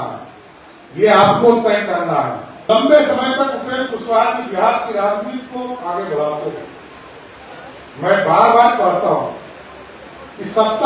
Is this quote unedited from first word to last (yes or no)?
no